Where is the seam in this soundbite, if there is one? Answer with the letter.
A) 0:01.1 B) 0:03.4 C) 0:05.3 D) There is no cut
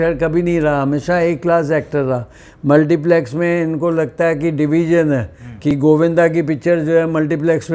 D